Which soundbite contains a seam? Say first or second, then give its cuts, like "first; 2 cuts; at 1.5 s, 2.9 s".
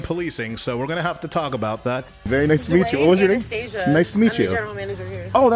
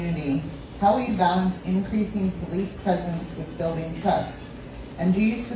first; 1 cut; at 2.1 s